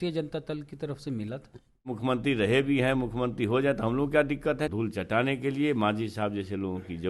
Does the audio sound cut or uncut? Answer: cut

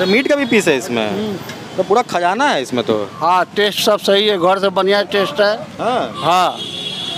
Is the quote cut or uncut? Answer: cut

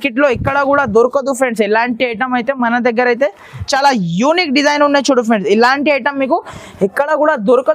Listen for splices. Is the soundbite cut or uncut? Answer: cut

